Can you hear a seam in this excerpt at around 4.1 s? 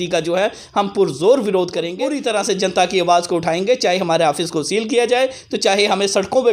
no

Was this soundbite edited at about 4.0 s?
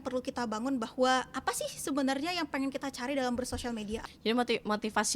yes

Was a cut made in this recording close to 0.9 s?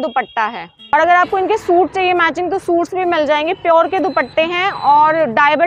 yes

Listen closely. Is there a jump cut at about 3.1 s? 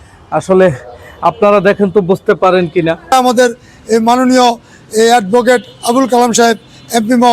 yes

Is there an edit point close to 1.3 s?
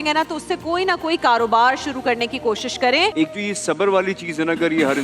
no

